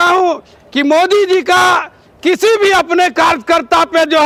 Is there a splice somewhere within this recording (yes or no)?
no